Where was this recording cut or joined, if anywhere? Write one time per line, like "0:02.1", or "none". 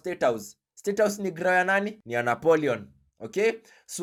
none